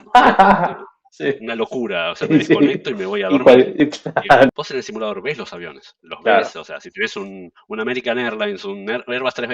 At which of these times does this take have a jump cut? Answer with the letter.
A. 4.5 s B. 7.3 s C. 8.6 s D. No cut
A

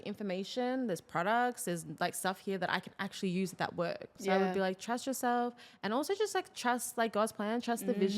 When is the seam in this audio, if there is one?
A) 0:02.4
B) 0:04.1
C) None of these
B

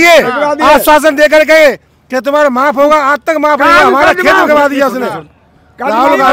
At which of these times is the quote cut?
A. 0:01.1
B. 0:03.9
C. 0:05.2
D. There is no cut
D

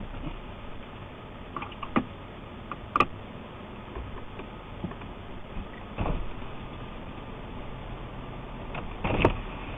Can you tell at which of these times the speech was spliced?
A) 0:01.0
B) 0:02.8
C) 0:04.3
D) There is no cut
D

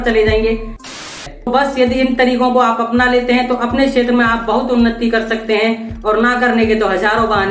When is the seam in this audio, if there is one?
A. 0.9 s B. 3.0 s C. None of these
A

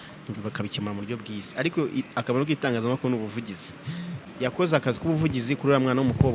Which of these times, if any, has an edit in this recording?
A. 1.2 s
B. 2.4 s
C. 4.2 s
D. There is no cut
C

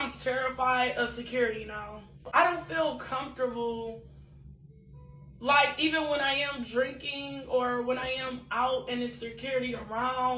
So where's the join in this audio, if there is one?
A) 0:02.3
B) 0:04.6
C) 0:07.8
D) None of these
A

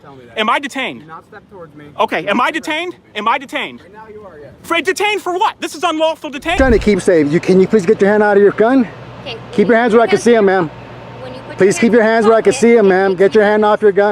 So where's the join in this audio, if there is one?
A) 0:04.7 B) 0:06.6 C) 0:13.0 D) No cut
B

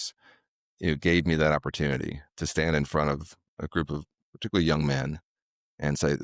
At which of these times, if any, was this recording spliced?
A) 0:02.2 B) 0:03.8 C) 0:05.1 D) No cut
D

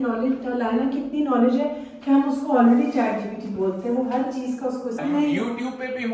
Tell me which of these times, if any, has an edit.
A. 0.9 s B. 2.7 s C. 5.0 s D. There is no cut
C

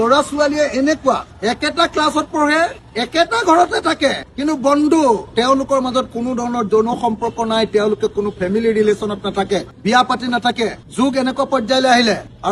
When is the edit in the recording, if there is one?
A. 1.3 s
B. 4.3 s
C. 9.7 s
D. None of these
A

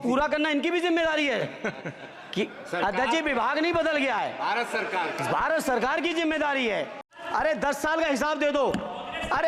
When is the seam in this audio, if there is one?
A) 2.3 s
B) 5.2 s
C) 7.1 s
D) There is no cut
C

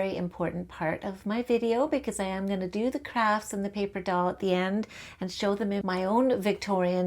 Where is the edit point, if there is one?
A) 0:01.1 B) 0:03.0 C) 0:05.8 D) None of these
C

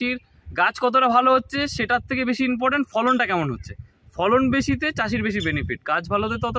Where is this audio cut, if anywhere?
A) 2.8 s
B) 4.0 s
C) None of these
C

